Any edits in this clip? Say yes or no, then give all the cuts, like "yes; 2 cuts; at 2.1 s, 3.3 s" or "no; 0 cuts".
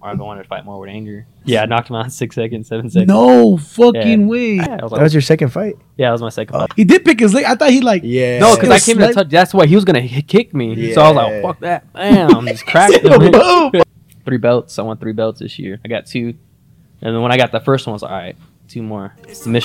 yes; 4 cuts; at 1.3 s, 4.7 s, 6.7 s, 13.8 s